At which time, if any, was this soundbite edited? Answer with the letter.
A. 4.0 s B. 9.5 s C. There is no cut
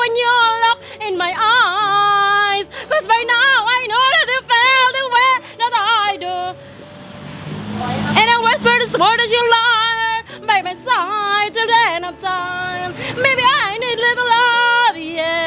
C